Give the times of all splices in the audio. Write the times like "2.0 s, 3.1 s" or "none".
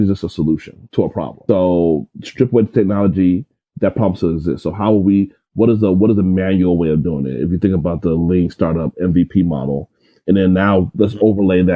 1.2 s